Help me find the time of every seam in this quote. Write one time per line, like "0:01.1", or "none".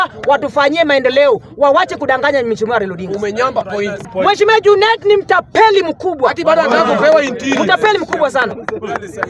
0:04.0

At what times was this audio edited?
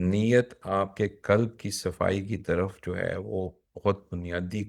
none

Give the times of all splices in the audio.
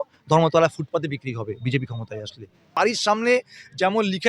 0:02.8

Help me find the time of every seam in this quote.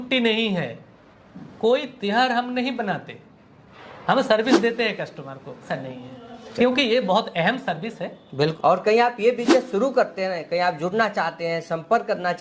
0:05.7
0:08.5

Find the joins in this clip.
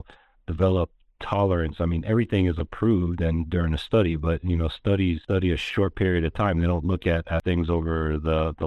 0:05.2
0:07.4

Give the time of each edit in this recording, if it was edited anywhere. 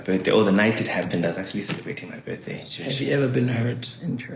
0:02.7

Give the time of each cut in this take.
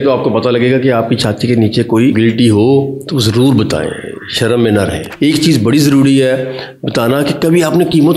0:02.1
0:05.1

